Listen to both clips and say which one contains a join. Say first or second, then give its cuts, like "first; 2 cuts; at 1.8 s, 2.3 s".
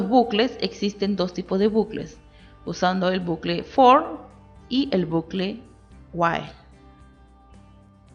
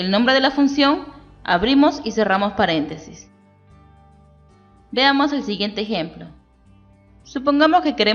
second; 2 cuts; at 3.2 s, 4.6 s